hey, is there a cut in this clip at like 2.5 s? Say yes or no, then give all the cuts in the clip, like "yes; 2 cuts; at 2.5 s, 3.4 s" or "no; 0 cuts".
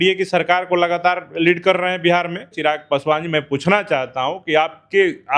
yes; 1 cut; at 2.5 s